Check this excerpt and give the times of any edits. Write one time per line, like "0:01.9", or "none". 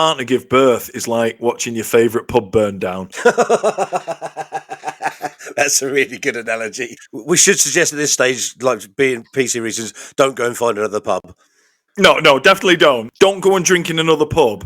0:06.9
0:13.1